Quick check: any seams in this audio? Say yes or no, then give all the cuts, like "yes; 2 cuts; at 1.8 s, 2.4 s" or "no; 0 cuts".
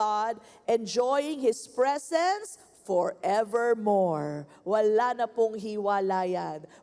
no; 0 cuts